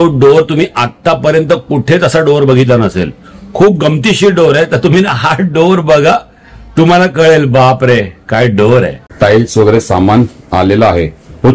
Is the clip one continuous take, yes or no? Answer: no